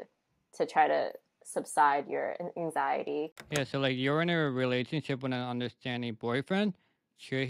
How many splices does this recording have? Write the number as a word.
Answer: one